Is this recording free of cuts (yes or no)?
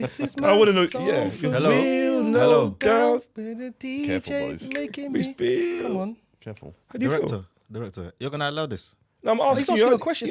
yes